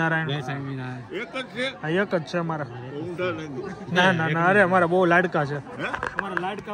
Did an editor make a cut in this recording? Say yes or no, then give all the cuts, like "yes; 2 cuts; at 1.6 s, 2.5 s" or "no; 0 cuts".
no; 0 cuts